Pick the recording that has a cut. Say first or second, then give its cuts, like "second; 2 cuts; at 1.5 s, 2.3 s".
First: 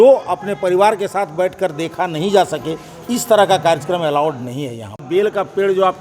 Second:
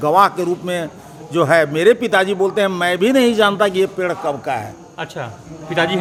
first; 1 cut; at 5.0 s